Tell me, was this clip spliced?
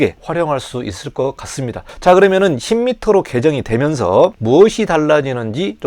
yes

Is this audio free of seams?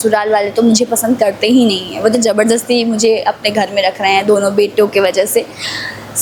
yes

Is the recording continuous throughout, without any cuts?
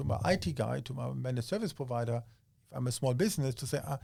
yes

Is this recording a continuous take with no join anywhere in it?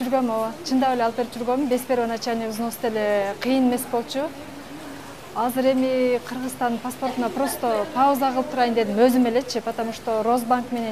yes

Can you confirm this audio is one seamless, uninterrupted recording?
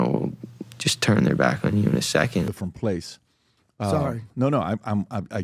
no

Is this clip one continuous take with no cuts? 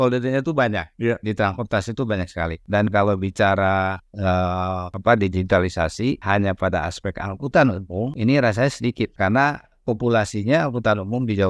no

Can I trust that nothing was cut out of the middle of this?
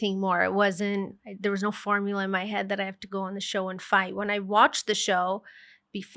yes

